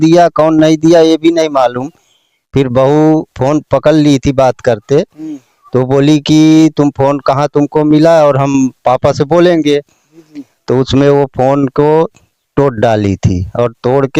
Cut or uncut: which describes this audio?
uncut